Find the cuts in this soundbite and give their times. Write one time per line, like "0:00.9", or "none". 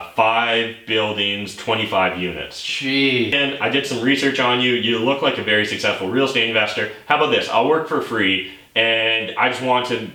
0:03.3